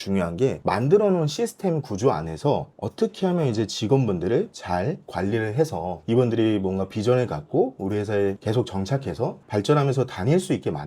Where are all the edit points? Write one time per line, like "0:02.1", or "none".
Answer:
none